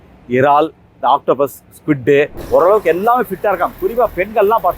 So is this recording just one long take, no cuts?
no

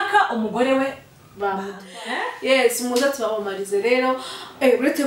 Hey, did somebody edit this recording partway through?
yes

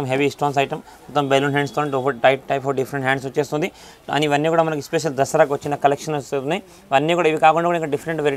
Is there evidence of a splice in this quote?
no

